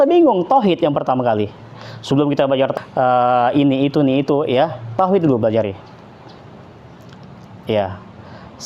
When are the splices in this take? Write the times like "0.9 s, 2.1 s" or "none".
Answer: 2.7 s

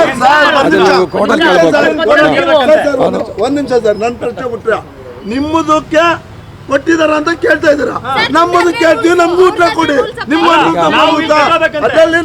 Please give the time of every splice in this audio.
none

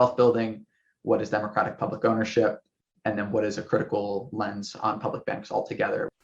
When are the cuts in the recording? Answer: none

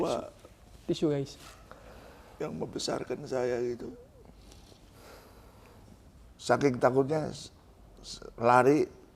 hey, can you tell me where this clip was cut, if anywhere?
6.2 s

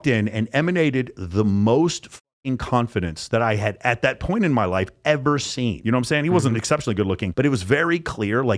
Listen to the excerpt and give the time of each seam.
5.8 s

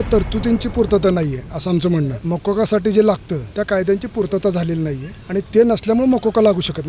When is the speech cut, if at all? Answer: 2.2 s, 3.4 s, 5.1 s

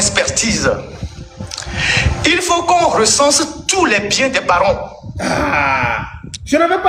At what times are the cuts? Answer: none

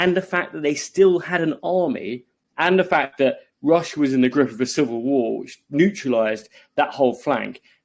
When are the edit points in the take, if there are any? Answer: none

